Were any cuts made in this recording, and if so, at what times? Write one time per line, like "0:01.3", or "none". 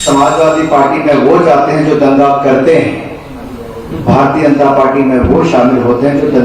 none